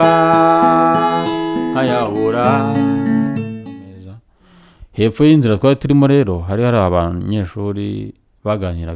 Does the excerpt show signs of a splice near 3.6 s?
yes; 1 cut; at 3.6 s

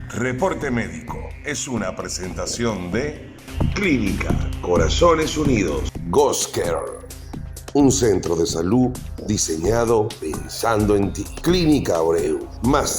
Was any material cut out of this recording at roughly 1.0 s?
yes; 1 cut; at 1.0 s

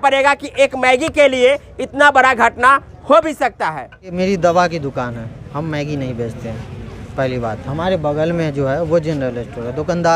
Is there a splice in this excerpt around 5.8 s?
no; 1 cut; at 4.1 s

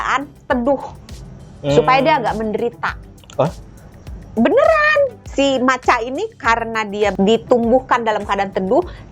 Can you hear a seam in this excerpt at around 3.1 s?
no; 2 cuts; at 5.2 s, 7.1 s

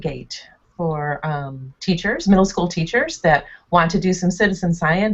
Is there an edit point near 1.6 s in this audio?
yes; 1 cut; at 1.6 s

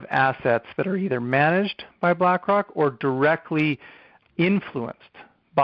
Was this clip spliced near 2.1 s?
no; 1 cut; at 4.2 s

